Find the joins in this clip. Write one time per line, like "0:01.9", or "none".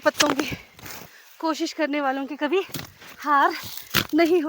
0:01.3